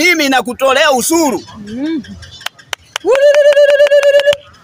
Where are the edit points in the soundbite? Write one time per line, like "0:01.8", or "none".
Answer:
none